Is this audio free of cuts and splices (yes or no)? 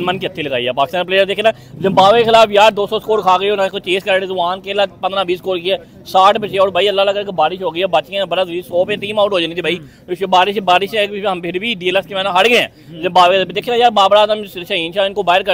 yes